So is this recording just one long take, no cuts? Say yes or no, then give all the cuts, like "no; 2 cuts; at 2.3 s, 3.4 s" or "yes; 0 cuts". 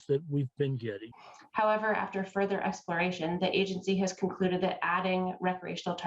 no; 1 cut; at 1.1 s